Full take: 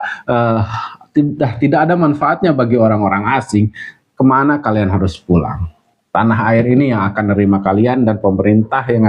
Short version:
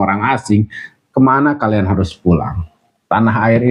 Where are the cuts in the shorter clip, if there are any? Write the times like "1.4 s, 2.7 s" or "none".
none